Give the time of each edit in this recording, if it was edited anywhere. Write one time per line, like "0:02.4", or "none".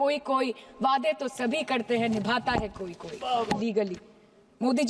0:03.6

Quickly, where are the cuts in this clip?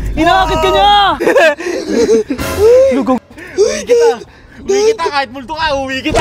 0:01.2

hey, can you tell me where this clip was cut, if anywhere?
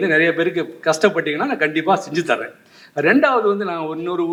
none

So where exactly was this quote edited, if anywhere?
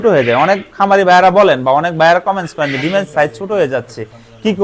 none

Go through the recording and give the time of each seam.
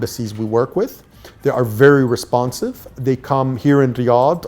none

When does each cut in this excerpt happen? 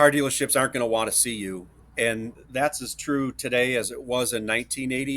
0:02.3

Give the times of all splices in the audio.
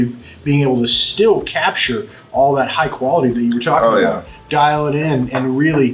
none

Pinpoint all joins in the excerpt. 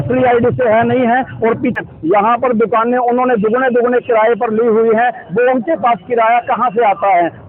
0:01.8

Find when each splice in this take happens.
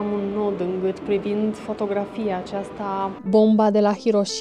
0:03.2

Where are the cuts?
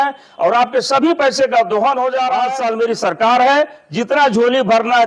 0:02.5

